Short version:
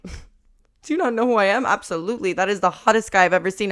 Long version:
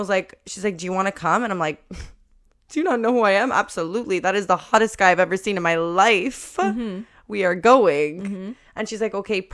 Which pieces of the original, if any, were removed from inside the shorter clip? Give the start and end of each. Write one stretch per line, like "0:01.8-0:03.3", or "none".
none